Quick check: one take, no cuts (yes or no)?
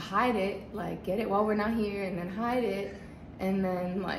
yes